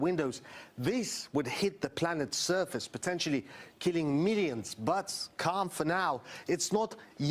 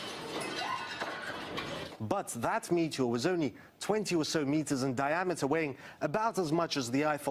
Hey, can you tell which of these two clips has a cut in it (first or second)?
second